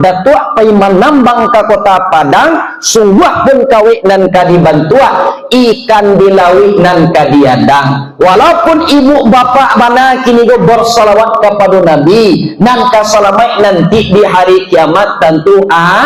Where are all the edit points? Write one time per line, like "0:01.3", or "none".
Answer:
none